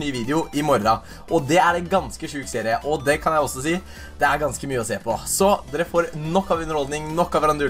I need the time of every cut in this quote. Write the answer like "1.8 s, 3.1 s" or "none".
6.6 s